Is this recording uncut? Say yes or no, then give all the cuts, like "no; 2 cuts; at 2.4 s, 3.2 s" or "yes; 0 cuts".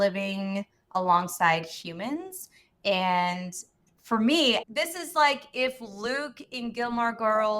no; 1 cut; at 4.6 s